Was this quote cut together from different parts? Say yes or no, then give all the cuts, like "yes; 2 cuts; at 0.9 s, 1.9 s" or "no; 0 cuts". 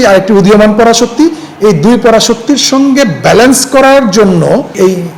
no; 0 cuts